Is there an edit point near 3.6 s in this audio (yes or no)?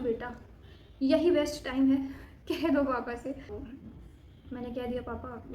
yes